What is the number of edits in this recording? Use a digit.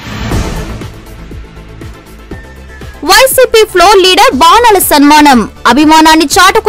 1